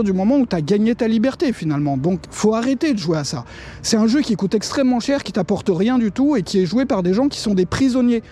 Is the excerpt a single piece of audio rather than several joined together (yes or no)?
yes